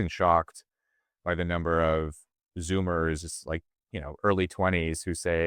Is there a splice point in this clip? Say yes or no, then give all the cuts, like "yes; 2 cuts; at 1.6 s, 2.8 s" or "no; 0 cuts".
no; 0 cuts